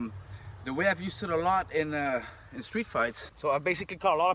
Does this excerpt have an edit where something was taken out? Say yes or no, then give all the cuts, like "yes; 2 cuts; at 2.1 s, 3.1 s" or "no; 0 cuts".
yes; 1 cut; at 3.3 s